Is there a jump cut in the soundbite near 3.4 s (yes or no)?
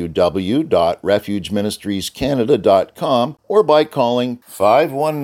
yes